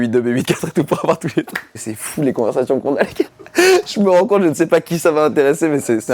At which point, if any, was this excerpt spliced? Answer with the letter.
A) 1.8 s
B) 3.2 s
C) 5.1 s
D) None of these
A